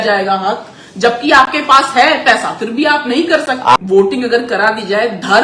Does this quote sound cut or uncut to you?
cut